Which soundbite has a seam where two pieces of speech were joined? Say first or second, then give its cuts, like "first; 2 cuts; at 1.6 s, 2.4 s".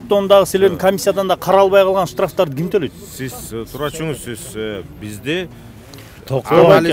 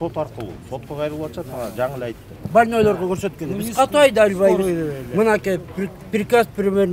second; 1 cut; at 2.3 s